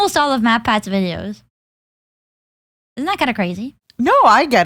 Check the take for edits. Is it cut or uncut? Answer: uncut